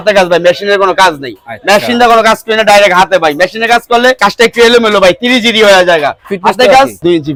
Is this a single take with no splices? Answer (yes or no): yes